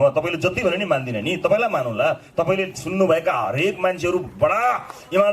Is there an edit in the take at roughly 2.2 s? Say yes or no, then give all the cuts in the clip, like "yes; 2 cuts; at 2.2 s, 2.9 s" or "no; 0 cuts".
no; 0 cuts